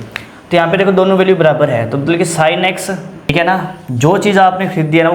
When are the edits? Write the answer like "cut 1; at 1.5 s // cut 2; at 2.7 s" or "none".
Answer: cut 1; at 3.3 s